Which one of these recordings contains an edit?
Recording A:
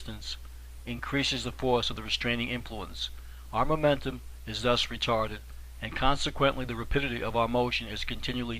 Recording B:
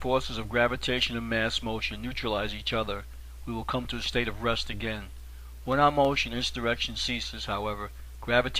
B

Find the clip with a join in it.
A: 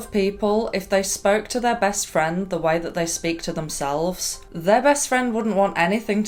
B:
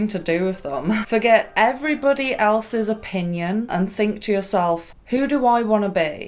B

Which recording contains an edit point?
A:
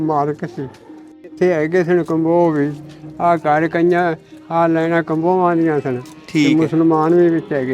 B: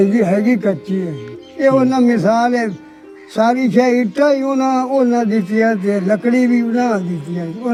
A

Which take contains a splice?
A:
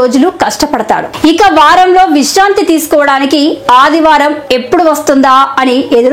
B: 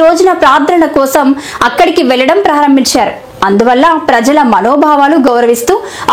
A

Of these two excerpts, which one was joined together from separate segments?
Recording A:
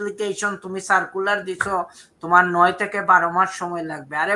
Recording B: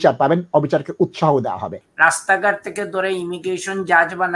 B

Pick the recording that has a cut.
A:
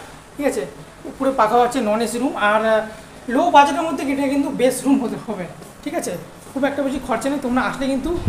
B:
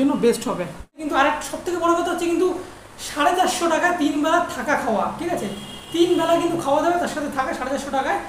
B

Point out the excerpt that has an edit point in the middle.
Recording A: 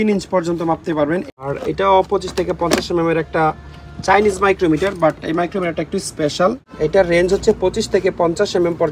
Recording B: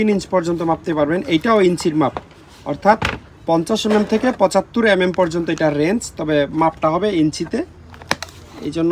A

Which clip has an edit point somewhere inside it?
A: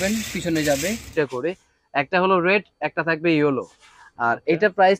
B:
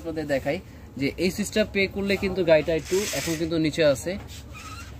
A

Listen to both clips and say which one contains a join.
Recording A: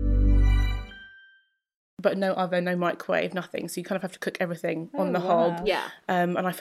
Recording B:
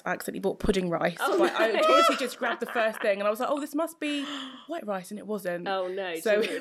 A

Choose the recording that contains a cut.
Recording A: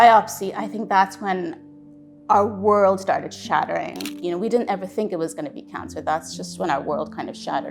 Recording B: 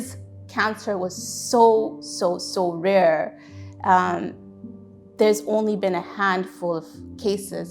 A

